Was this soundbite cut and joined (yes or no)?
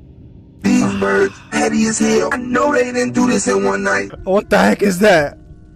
yes